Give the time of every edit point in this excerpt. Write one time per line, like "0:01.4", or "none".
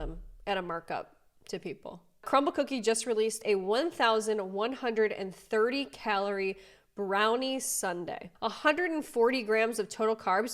0:02.2
0:08.3